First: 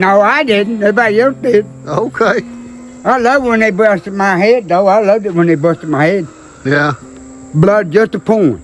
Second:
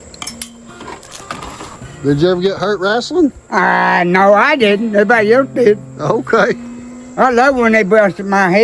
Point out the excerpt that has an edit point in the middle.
second; 1 cut; at 1.8 s

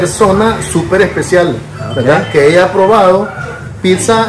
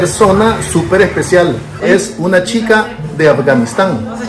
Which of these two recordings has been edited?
second; 1 cut; at 1.9 s

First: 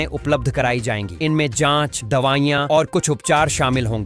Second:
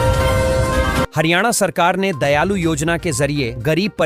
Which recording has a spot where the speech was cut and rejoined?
second; 1 cut; at 1.1 s

